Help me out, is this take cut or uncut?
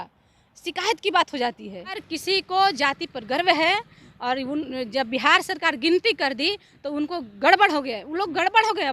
cut